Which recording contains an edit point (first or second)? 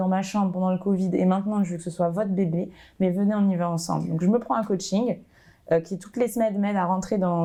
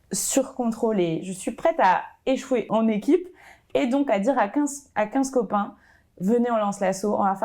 second